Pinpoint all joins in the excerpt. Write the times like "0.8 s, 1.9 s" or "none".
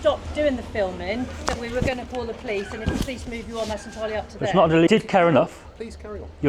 4.9 s